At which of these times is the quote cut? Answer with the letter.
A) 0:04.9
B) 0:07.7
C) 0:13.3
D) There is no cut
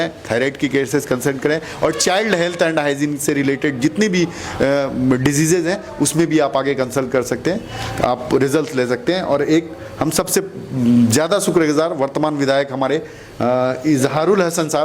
D